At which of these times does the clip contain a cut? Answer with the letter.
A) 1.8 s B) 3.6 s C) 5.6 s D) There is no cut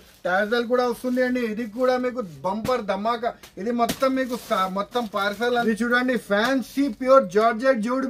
C